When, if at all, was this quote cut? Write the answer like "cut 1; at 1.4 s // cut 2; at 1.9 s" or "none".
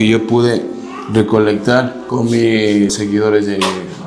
cut 1; at 2.0 s // cut 2; at 2.9 s

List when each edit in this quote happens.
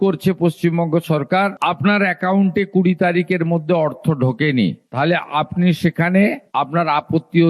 none

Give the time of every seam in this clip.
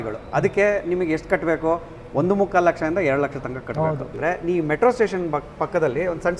cut 1; at 4.1 s

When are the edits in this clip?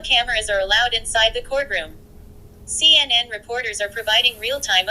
none

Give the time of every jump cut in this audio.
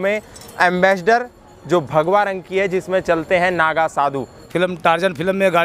cut 1; at 4.5 s

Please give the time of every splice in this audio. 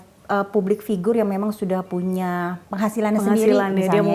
cut 1; at 2.6 s

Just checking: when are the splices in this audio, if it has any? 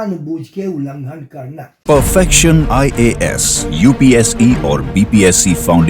none

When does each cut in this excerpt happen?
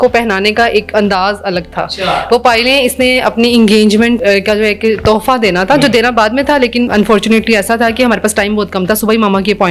cut 1; at 4.2 s // cut 2; at 6.9 s

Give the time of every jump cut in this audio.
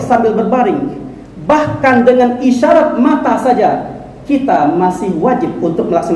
none

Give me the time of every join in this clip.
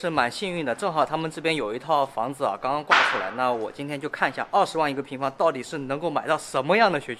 none

